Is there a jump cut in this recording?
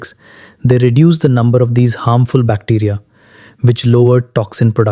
no; 0 cuts

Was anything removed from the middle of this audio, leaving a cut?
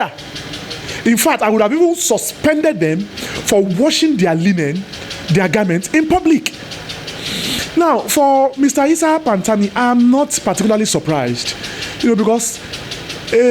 no; 0 cuts

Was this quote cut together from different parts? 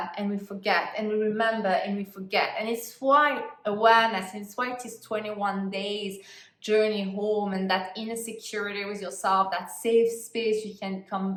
no; 0 cuts

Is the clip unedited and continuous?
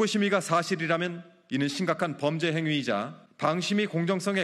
no; 1 cut; at 3.2 s

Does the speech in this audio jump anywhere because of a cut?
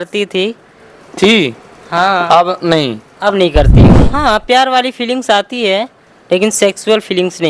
yes; 1 cut; at 4.1 s

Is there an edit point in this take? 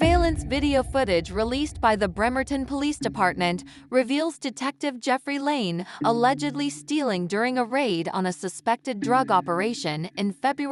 no; 0 cuts

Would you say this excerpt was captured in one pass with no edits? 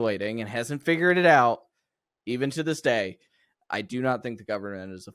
no; 1 cut; at 3.3 s

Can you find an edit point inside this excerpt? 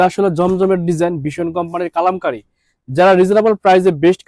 no; 0 cuts

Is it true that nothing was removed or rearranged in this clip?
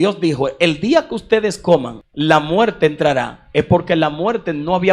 no; 1 cut; at 2.0 s

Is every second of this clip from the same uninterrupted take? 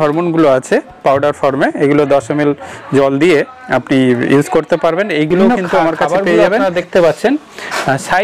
no; 1 cut; at 6.6 s

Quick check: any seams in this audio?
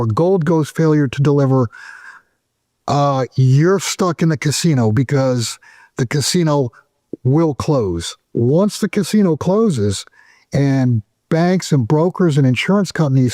yes; 1 cut; at 8.1 s

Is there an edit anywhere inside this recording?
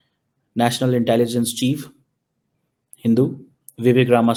no; 0 cuts

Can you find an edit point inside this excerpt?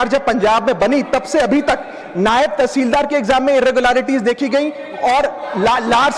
no; 0 cuts

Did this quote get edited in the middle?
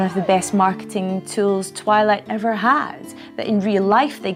no; 0 cuts

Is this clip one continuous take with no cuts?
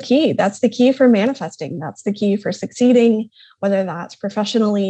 yes; 0 cuts

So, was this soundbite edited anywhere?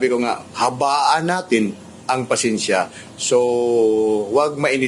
no; 0 cuts

